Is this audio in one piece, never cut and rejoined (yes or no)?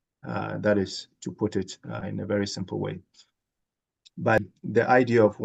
no